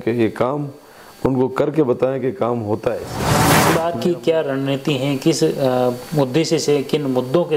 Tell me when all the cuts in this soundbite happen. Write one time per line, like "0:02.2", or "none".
0:03.6